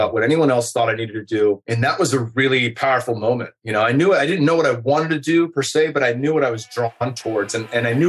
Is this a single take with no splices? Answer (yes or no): yes